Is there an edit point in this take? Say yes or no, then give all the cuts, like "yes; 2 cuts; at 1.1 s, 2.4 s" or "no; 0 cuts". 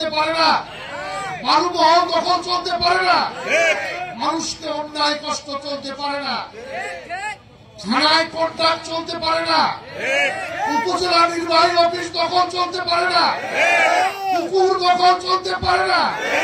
no; 0 cuts